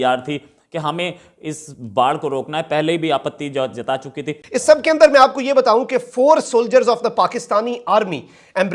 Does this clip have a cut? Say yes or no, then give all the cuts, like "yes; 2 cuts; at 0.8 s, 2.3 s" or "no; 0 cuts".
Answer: yes; 1 cut; at 4.4 s